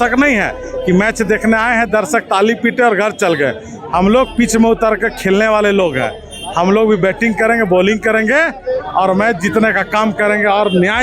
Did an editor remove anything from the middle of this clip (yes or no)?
no